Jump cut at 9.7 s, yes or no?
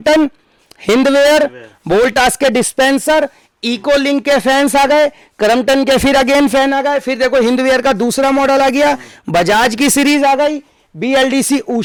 no